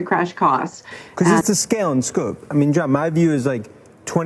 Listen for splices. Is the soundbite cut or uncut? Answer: cut